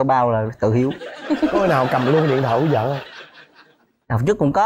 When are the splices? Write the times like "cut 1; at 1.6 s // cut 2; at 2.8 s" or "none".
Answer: none